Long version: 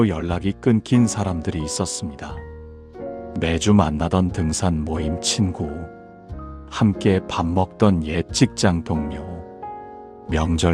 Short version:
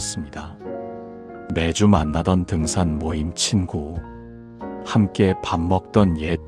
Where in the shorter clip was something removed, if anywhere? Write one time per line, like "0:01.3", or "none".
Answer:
none